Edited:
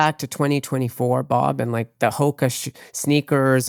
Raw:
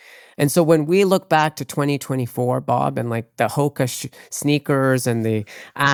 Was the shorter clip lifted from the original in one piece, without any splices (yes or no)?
yes